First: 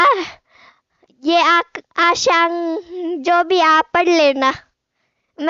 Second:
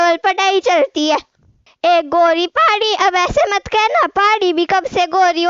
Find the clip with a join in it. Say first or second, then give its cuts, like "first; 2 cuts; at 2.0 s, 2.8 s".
second; 1 cut; at 1.6 s